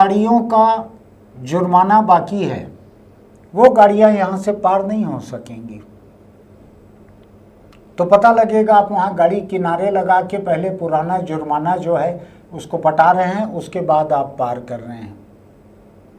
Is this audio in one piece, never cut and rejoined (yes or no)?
yes